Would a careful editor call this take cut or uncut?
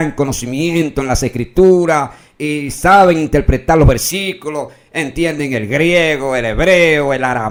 uncut